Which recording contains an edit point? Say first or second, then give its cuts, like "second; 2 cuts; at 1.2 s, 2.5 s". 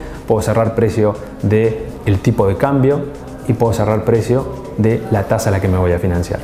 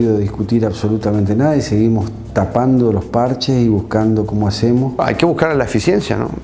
second; 1 cut; at 5.0 s